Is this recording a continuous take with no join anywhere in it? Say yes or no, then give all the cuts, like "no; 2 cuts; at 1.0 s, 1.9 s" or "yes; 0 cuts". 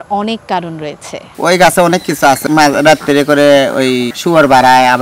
no; 3 cuts; at 1.3 s, 2.4 s, 4.1 s